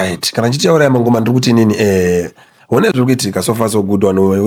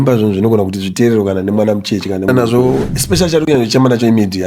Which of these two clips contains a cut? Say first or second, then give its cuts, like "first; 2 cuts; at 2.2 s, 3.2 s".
second; 1 cut; at 2.3 s